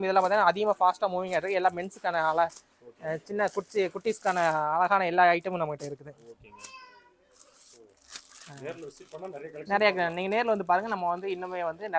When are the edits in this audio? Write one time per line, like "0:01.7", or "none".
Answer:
none